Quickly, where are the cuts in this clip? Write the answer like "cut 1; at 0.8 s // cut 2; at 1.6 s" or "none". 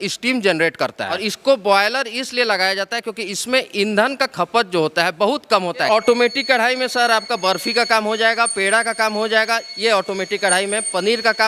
cut 1; at 1.3 s // cut 2; at 5.9 s